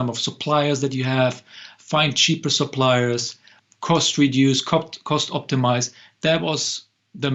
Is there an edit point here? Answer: yes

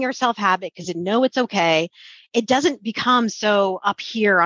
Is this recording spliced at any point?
no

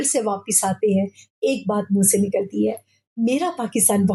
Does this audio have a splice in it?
no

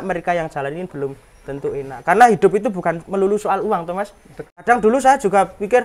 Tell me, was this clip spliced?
yes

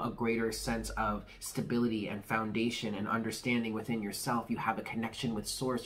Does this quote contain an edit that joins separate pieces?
no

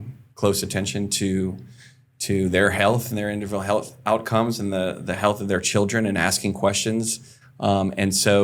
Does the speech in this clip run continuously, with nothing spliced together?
yes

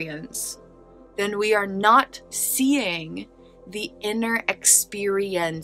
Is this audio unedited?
yes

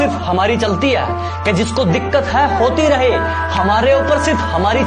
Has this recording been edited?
no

